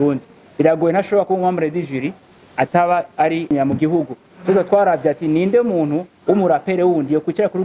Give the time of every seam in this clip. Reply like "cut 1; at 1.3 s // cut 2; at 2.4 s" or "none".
cut 1; at 3.5 s

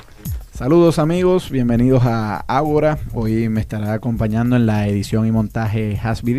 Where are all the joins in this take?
cut 1; at 1.8 s

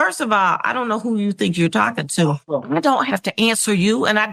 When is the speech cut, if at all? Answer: cut 1; at 2.4 s

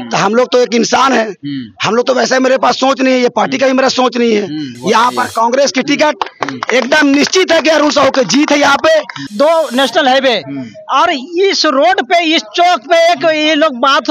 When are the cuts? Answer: cut 1; at 4.7 s // cut 2; at 9.2 s

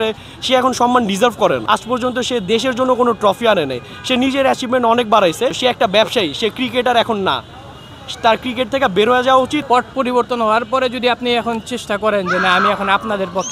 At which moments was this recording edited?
cut 1; at 1.6 s // cut 2; at 5.6 s // cut 3; at 9.6 s

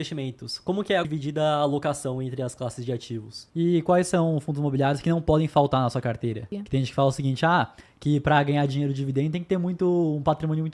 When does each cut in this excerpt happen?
cut 1; at 1.1 s // cut 2; at 3.4 s // cut 3; at 6.6 s

